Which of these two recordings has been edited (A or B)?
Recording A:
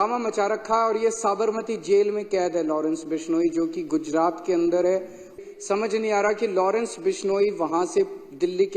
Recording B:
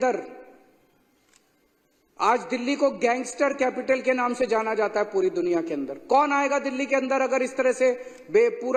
A